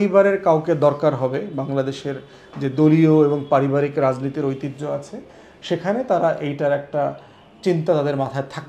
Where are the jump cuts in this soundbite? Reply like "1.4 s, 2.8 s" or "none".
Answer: none

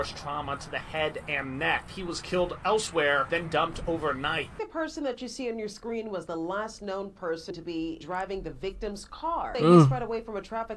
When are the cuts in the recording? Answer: 1.9 s, 3.2 s, 4.6 s, 8.0 s, 9.5 s

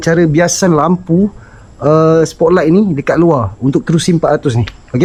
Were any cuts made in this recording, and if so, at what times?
none

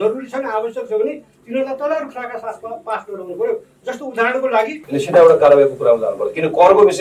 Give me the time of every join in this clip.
4.8 s

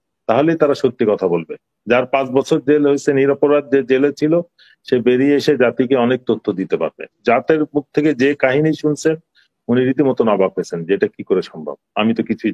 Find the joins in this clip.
7.2 s

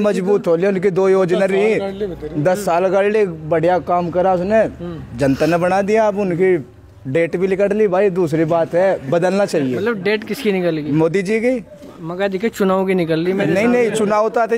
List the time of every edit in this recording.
none

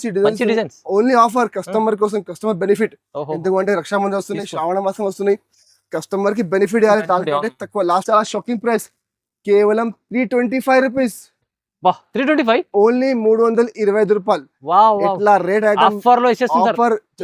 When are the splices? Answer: 8.0 s

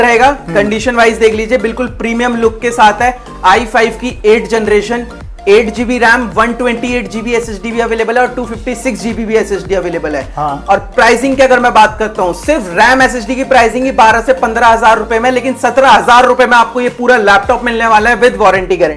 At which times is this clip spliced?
none

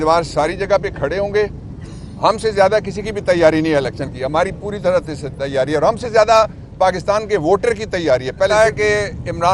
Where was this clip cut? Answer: 8.5 s

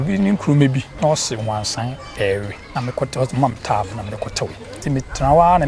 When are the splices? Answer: 0.9 s, 2.6 s, 4.8 s

